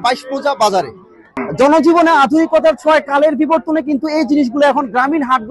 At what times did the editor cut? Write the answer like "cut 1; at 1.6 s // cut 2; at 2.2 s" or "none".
cut 1; at 1.4 s